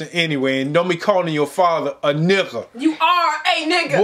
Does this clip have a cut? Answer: no; 0 cuts

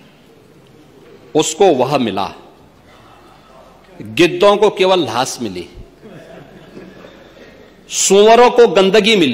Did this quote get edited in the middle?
no; 0 cuts

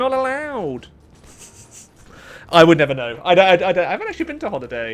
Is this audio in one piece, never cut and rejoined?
yes; 0 cuts

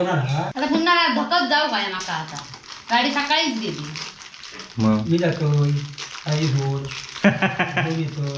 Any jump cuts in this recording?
no; 0 cuts

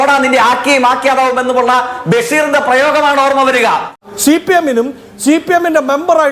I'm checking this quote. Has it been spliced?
yes; 1 cut; at 4.0 s

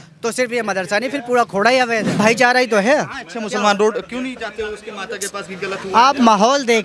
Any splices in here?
yes; 1 cut; at 2.1 s

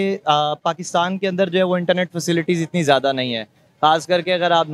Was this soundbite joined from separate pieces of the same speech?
no; 0 cuts

